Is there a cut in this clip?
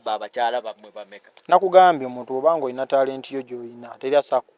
no; 0 cuts

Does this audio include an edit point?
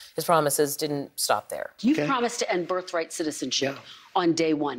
yes; 1 cut; at 1.6 s

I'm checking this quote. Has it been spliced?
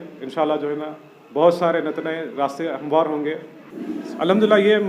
yes; 1 cut; at 3.5 s

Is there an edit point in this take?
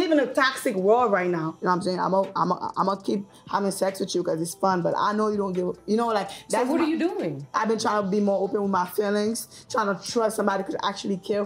yes; 2 cuts; at 1.5 s, 7.5 s

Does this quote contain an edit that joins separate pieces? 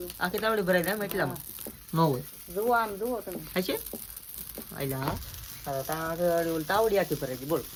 no; 0 cuts

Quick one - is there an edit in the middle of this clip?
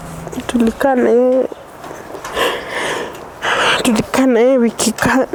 no; 0 cuts

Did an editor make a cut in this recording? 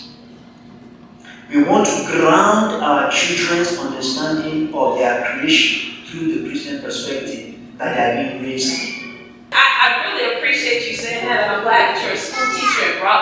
yes; 1 cut; at 9.5 s

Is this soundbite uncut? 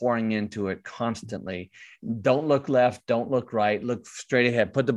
no; 1 cut; at 2.0 s

